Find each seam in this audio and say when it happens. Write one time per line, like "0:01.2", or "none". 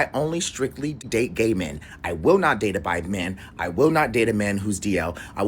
0:01.0